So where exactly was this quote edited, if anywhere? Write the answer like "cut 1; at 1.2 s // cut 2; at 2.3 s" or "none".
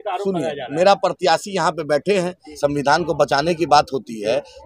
cut 1; at 2.4 s